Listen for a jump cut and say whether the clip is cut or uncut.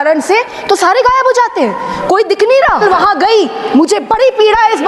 cut